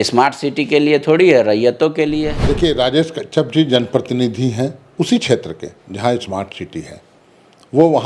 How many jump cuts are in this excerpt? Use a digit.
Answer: 1